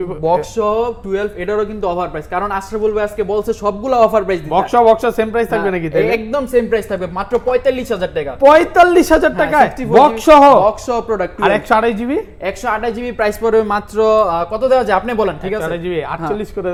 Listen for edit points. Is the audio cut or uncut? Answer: uncut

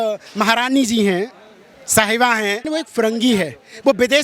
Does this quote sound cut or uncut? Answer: cut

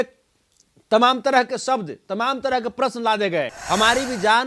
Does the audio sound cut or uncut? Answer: cut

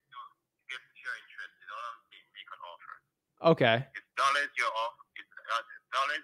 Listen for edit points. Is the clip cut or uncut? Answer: uncut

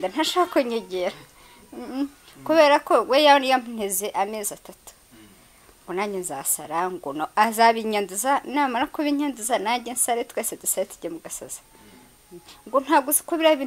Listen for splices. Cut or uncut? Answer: uncut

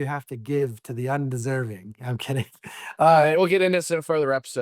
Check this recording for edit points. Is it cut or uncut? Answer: uncut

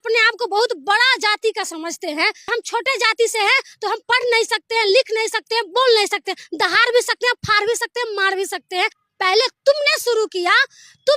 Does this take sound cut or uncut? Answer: cut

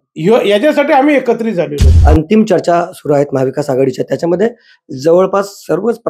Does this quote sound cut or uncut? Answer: cut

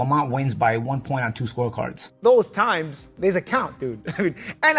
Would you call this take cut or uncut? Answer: cut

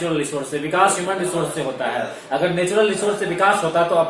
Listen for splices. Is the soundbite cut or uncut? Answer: uncut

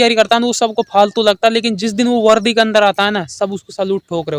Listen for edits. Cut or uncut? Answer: uncut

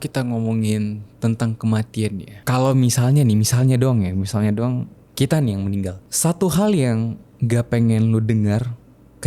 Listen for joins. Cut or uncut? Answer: cut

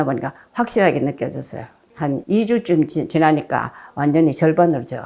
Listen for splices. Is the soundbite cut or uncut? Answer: uncut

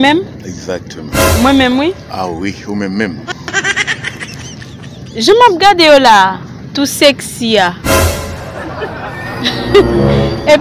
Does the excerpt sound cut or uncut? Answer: uncut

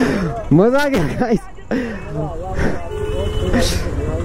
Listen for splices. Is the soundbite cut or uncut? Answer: uncut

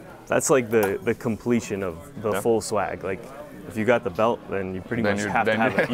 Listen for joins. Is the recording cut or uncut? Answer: uncut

